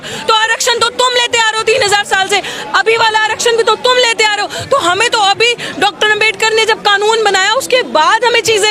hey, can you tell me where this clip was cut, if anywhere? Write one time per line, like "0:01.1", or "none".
none